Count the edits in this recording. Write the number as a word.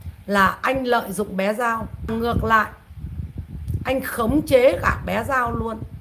one